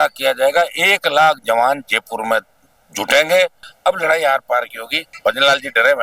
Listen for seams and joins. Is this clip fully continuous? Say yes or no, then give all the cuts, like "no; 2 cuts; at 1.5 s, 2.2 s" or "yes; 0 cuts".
no; 2 cuts; at 3.7 s, 5.1 s